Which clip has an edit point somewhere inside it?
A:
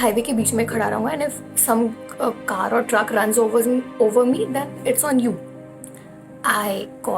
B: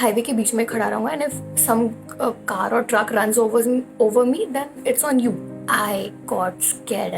B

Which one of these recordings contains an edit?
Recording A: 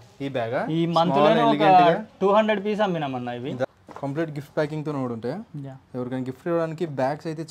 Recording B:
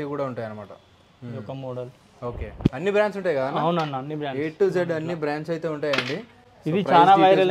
A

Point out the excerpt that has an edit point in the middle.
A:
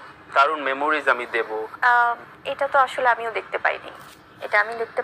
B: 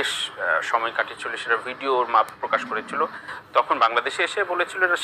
A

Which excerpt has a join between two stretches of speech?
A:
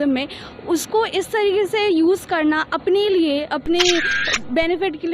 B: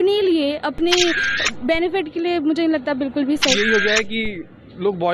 B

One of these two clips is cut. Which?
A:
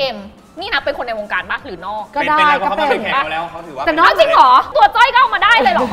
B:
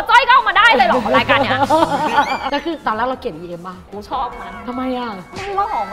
B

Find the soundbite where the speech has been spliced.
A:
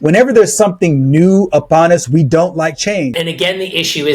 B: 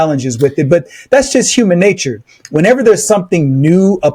A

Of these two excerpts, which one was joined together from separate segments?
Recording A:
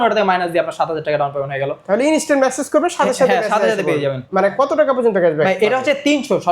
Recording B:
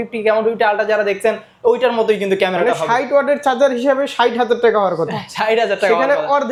A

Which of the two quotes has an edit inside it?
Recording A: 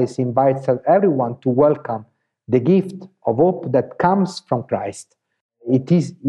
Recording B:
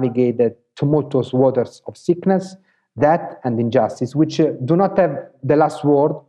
B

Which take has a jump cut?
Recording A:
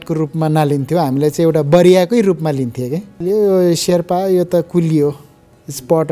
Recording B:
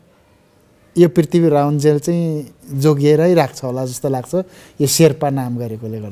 A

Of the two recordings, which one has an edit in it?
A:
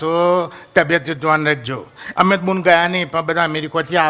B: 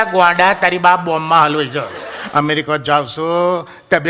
B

